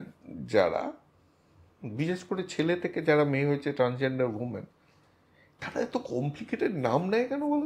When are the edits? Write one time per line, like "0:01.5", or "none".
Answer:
none